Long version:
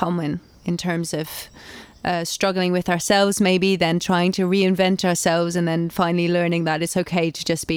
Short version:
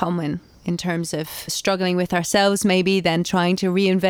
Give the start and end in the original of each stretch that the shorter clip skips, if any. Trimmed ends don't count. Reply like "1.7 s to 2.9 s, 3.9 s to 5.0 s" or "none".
1.5 s to 2.3 s